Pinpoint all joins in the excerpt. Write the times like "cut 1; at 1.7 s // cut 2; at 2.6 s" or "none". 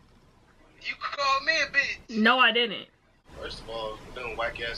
cut 1; at 3.2 s